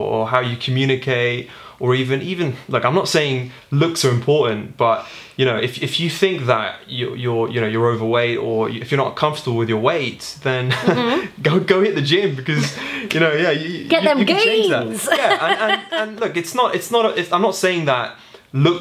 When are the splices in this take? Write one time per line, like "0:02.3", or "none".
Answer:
none